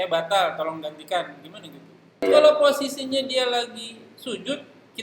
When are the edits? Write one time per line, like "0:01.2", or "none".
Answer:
0:02.2